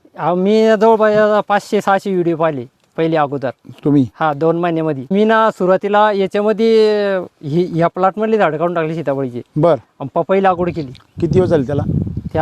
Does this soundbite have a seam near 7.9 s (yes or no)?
no